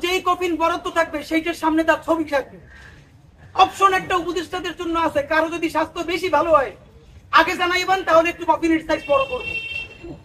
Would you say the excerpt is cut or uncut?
uncut